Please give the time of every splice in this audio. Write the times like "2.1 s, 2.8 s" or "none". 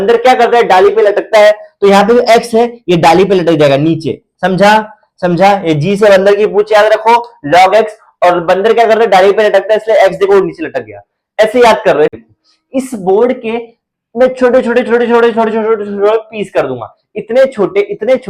12.2 s